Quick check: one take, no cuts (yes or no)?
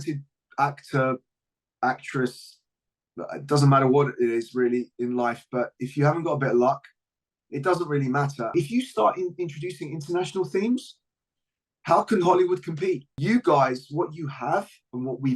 no